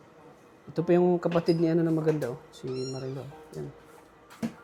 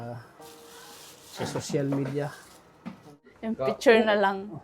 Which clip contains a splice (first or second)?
second